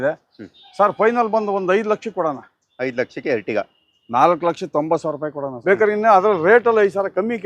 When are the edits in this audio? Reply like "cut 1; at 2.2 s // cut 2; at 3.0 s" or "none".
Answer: cut 1; at 5.5 s